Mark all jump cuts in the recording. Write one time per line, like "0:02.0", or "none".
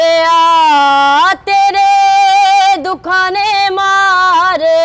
none